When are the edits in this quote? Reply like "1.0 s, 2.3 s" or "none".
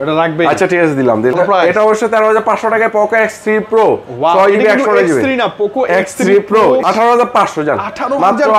1.3 s, 6.8 s